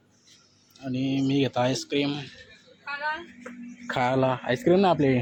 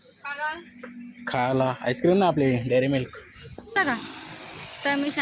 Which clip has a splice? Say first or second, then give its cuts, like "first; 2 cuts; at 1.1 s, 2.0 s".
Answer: second; 1 cut; at 3.8 s